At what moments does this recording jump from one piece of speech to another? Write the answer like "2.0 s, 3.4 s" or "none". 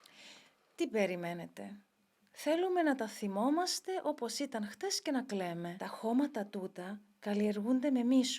5.8 s